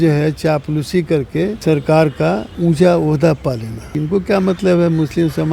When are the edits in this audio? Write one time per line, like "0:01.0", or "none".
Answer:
0:01.6
0:02.6
0:03.9